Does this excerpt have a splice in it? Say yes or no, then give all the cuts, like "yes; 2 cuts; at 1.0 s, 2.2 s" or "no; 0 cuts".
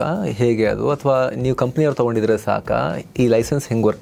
no; 0 cuts